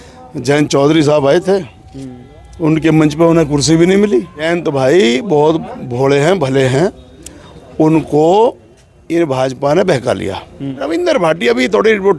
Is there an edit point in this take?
yes; 2 cuts; at 4.4 s, 10.7 s

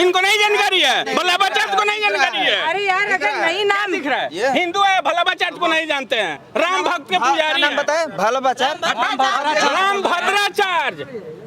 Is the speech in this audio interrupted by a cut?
no; 0 cuts

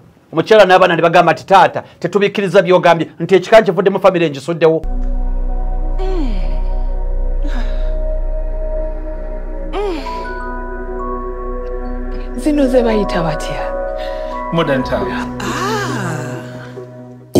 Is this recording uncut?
no; 1 cut; at 5.0 s

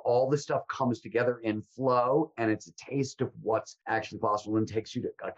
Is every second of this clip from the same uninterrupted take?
no; 1 cut; at 3.7 s

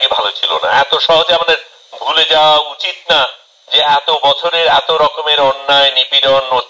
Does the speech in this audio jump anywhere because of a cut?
no; 0 cuts

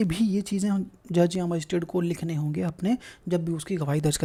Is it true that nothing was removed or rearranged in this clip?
yes; 0 cuts

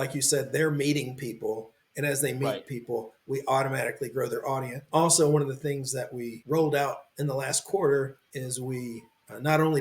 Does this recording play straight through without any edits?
no; 2 cuts; at 7.1 s, 8.2 s

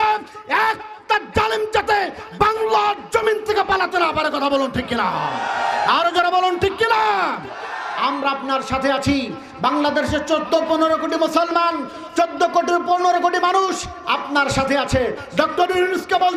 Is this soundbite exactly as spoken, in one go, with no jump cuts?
yes; 0 cuts

